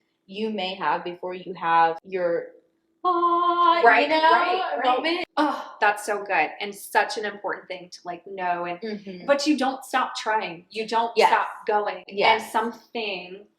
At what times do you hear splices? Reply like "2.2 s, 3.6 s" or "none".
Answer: 2.0 s, 5.3 s